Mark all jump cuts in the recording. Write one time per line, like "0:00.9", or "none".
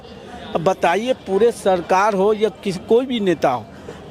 none